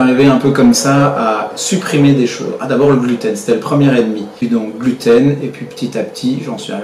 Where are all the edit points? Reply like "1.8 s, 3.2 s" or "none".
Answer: 4.7 s

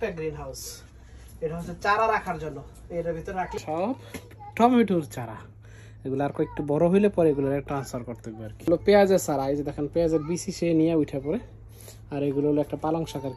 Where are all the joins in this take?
3.6 s, 8.7 s

